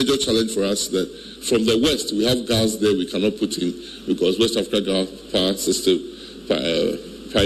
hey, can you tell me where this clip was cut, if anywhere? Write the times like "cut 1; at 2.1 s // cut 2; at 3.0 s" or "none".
none